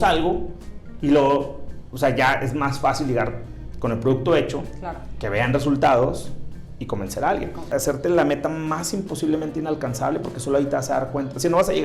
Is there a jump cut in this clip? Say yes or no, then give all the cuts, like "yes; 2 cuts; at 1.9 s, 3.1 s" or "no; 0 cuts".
yes; 1 cut; at 7.7 s